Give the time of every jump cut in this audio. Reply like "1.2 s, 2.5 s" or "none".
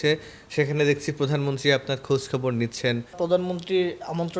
3.1 s